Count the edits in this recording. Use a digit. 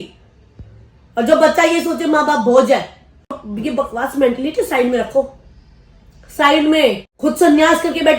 2